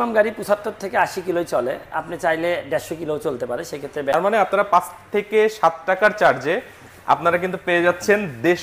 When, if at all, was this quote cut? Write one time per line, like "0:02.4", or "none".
0:04.1